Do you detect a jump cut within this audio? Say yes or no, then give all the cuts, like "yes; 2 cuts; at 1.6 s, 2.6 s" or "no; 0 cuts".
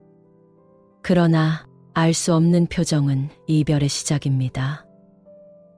yes; 2 cuts; at 1.0 s, 4.8 s